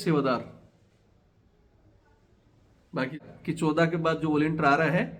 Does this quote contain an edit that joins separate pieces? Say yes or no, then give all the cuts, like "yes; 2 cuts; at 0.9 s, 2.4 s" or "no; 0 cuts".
yes; 1 cut; at 3.2 s